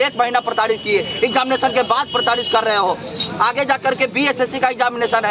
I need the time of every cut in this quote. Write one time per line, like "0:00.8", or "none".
none

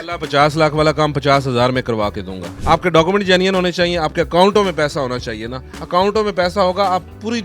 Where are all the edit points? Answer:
0:02.5

